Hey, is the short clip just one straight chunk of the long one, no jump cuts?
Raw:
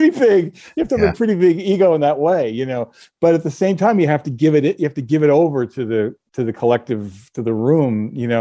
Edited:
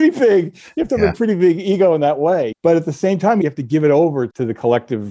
no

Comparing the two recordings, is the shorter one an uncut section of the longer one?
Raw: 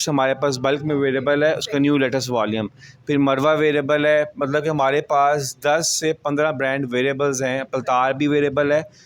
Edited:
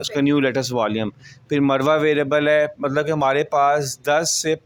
yes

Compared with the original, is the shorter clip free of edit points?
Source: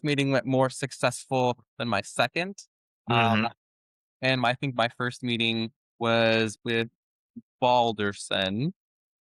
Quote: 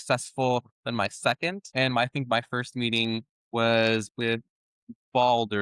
no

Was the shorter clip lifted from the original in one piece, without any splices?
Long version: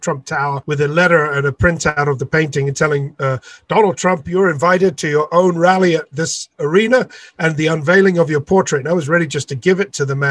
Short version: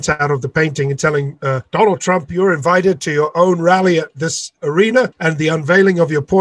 no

